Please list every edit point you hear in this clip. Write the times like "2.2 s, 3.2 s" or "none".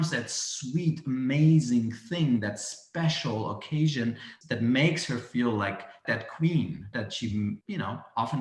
4.3 s, 6.0 s, 6.9 s, 7.6 s